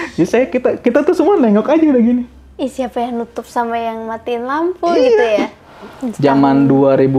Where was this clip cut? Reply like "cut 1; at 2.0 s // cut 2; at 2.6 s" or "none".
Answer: cut 1; at 5.6 s